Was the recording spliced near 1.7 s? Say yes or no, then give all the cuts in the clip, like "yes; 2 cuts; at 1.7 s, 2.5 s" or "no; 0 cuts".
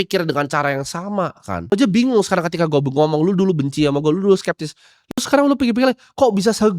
yes; 1 cut; at 1.7 s